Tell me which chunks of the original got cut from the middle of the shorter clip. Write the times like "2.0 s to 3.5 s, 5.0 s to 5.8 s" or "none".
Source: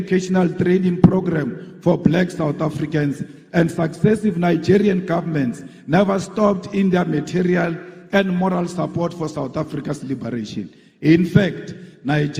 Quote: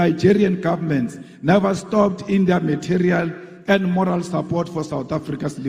none